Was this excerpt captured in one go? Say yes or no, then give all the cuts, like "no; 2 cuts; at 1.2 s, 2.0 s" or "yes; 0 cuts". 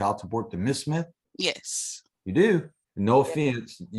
no; 2 cuts; at 1.2 s, 2.8 s